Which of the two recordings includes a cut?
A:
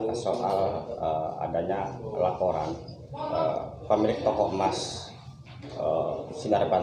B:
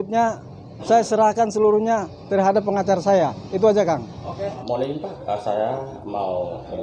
B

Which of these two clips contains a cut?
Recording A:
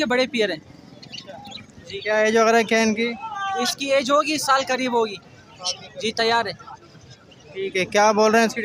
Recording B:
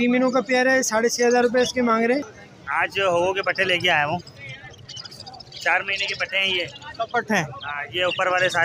B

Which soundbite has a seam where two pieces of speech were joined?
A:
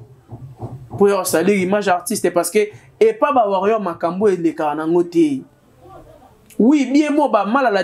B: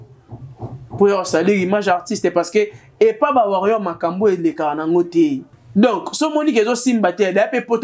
B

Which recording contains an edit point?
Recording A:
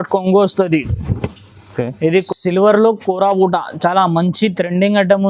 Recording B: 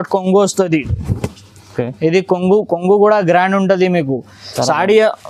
A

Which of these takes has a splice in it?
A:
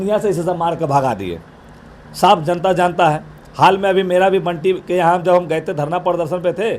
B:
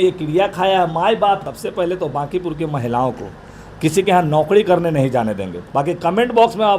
B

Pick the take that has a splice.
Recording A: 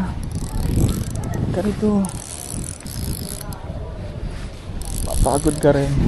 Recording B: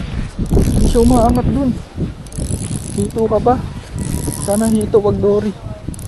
A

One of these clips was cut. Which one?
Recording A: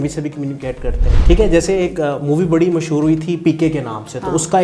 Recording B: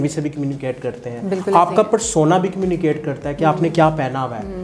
A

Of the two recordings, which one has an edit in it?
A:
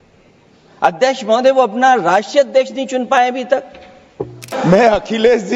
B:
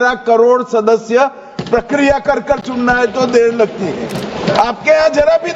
A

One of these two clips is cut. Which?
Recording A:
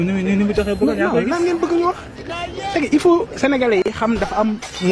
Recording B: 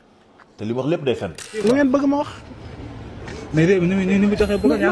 B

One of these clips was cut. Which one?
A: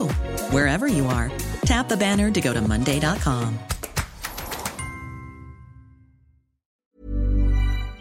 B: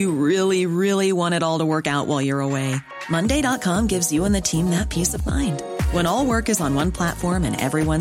A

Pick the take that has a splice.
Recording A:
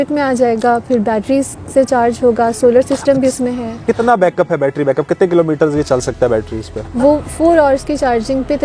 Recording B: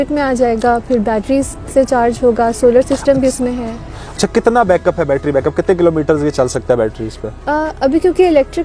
A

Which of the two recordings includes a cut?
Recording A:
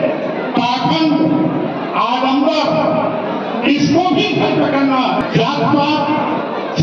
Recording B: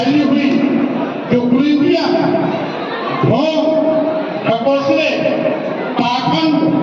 A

